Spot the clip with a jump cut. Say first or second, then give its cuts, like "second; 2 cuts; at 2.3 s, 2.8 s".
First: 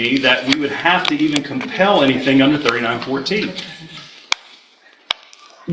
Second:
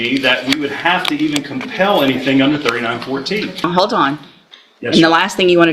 second; 1 cut; at 3.6 s